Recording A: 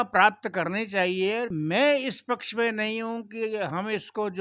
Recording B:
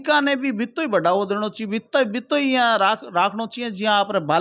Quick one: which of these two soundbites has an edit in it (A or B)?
A